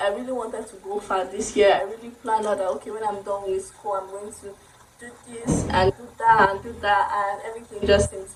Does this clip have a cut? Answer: no; 0 cuts

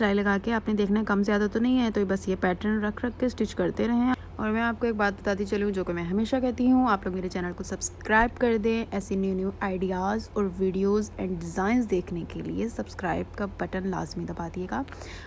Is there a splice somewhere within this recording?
no; 0 cuts

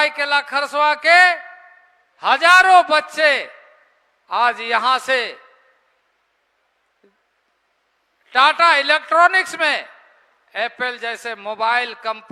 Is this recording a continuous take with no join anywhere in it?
yes; 0 cuts

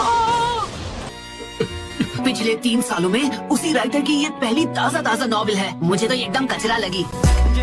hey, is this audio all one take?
no; 1 cut; at 1.1 s

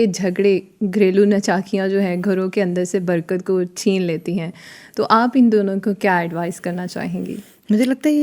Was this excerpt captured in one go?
yes; 0 cuts

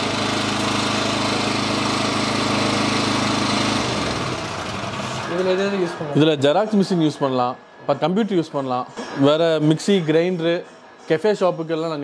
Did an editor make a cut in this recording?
no; 0 cuts

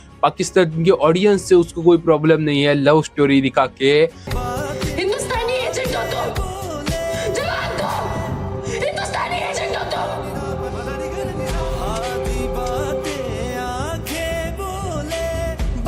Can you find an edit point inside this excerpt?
no; 0 cuts

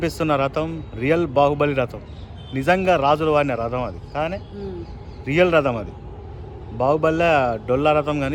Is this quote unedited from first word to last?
yes; 0 cuts

